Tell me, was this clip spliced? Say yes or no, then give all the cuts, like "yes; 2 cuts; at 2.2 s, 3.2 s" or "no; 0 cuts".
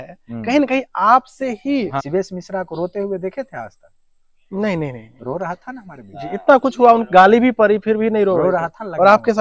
yes; 1 cut; at 1.9 s